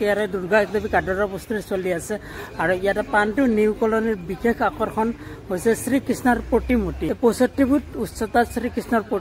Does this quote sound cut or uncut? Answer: cut